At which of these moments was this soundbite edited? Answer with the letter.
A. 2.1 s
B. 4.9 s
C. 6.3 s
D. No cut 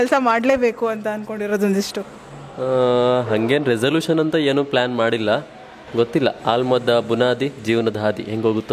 D